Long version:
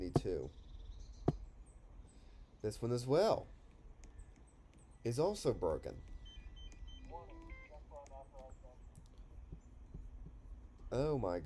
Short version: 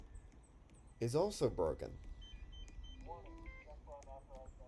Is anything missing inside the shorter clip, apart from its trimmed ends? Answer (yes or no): no